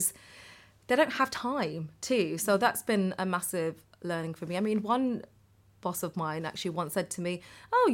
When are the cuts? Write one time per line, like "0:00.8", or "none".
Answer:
none